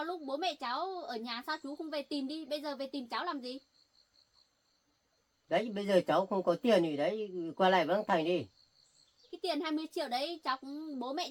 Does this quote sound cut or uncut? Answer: uncut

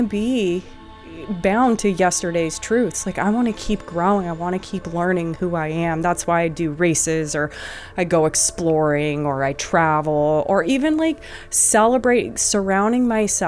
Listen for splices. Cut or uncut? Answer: uncut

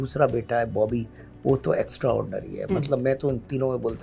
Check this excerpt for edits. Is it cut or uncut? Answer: uncut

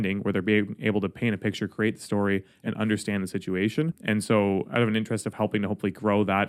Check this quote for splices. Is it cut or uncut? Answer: cut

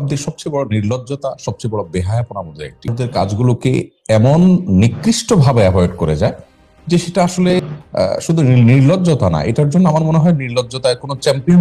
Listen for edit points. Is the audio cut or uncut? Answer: cut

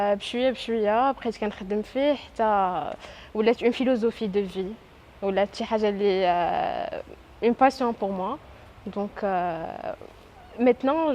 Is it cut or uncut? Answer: cut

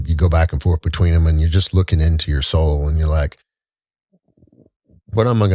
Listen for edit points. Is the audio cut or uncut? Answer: uncut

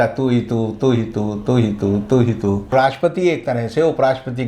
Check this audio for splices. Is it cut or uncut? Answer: cut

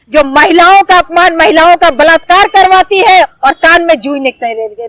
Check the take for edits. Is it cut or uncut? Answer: uncut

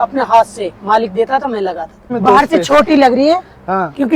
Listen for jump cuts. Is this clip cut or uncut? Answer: cut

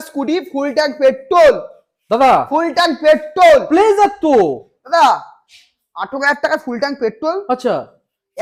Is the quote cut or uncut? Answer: uncut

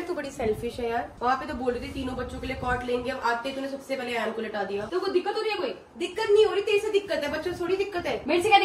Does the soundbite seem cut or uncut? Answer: cut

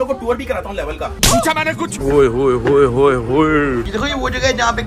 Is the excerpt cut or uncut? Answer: uncut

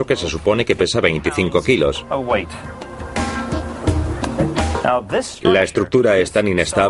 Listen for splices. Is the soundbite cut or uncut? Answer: cut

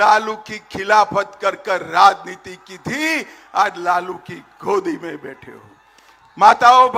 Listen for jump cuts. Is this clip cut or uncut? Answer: uncut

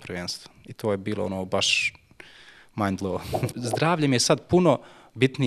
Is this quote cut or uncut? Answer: cut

